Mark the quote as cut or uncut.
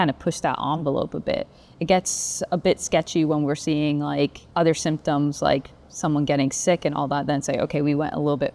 cut